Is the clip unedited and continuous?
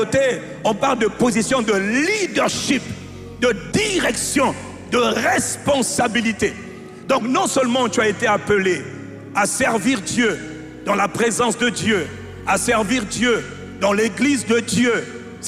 yes; 0 cuts

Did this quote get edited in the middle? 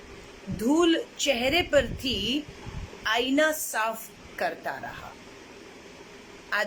no; 0 cuts

